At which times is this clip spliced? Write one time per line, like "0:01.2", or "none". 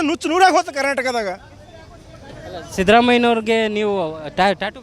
none